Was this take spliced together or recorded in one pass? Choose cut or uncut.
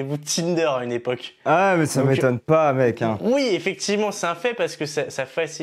uncut